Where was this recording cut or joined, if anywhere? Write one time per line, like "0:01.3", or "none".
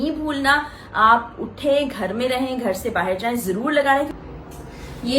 0:04.2